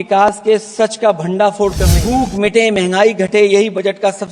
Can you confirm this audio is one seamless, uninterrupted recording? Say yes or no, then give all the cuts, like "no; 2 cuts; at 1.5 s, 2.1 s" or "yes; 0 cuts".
no; 1 cut; at 2.0 s